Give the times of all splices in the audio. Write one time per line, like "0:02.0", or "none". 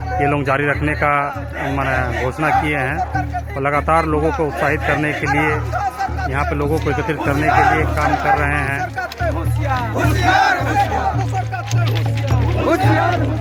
none